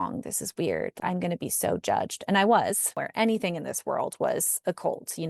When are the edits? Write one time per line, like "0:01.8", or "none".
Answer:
0:02.9